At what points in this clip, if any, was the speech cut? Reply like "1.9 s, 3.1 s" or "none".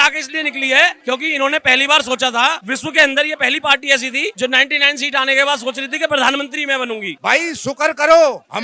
1.0 s, 2.7 s, 4.3 s, 7.2 s